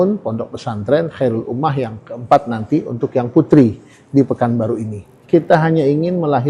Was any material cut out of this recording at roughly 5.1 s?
yes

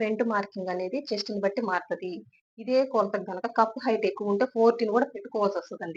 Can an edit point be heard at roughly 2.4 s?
no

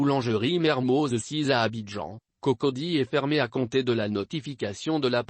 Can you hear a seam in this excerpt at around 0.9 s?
yes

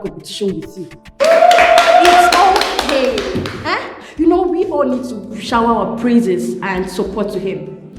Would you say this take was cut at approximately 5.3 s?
no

